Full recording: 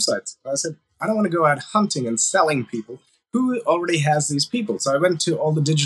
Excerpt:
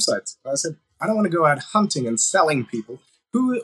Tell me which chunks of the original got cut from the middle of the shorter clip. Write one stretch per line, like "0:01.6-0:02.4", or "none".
none